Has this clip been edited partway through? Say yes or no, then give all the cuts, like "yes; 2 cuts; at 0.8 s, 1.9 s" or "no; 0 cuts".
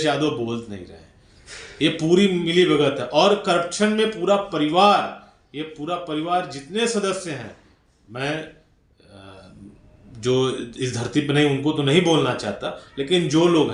no; 0 cuts